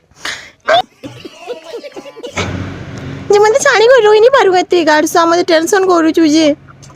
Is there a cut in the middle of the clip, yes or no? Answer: yes